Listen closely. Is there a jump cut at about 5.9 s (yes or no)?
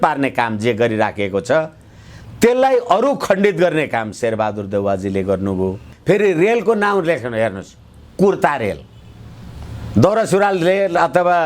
yes